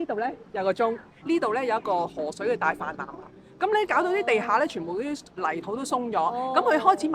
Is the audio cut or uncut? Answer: cut